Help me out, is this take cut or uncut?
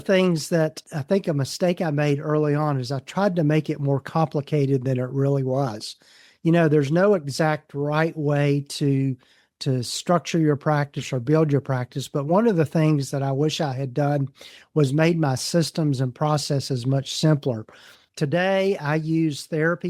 uncut